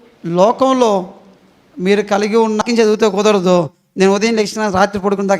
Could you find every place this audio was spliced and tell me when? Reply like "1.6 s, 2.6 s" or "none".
2.6 s